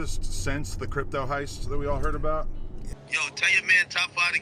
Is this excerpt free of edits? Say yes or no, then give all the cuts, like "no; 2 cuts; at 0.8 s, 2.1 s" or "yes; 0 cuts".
no; 1 cut; at 2.9 s